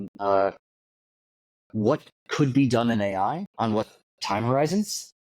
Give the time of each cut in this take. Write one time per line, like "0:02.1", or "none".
0:03.5

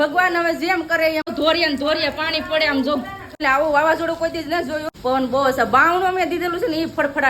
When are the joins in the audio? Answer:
0:01.3
0:03.4
0:04.9

